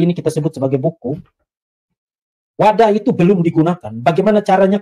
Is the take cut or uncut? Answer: uncut